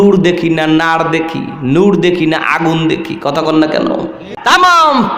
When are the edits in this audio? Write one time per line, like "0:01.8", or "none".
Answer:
0:04.3